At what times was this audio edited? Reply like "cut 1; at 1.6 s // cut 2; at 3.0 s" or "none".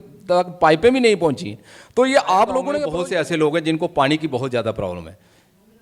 cut 1; at 2.8 s